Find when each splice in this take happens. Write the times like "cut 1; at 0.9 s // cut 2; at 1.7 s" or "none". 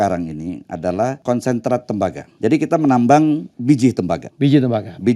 cut 1; at 1.2 s // cut 2; at 2.2 s // cut 3; at 3.5 s // cut 4; at 4.3 s